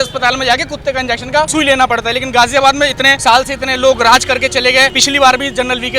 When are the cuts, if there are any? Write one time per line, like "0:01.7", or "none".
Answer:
0:01.5
0:03.1
0:05.0